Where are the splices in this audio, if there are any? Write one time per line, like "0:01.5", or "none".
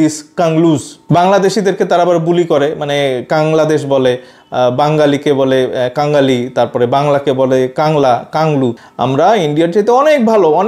0:08.9